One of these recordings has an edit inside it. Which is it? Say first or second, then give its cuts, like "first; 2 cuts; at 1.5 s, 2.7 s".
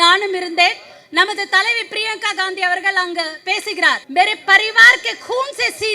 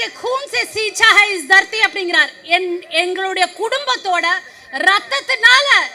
first; 1 cut; at 4.0 s